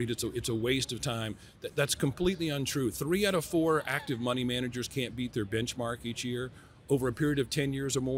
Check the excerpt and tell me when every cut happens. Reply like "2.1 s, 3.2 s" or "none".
none